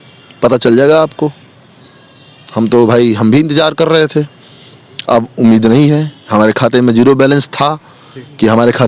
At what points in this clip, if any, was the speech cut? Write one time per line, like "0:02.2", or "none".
none

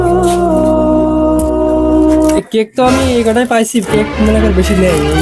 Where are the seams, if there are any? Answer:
0:02.4

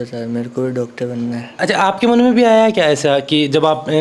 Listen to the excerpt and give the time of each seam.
0:01.5

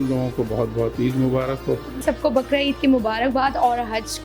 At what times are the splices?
0:02.0

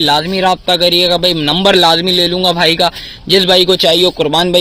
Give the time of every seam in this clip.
none

